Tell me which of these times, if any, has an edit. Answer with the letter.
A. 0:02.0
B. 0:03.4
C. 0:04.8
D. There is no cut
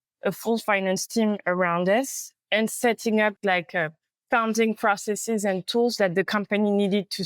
B